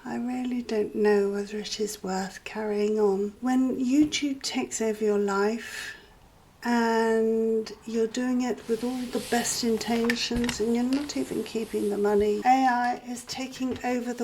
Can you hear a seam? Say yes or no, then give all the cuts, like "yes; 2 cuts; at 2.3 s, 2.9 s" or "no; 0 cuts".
yes; 2 cuts; at 3.3 s, 12.4 s